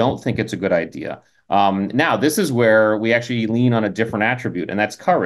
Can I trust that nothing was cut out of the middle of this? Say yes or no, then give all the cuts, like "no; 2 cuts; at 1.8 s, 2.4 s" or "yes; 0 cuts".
yes; 0 cuts